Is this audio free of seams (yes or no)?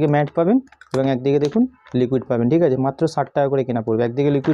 yes